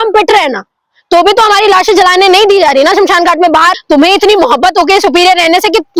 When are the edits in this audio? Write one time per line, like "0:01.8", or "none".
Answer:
0:03.8